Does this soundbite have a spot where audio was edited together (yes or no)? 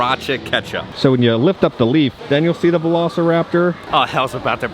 yes